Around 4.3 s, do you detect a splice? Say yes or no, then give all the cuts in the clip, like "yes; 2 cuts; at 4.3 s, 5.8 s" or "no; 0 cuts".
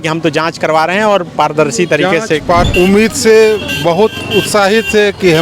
no; 1 cut; at 2.6 s